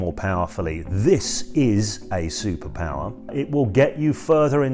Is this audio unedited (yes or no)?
no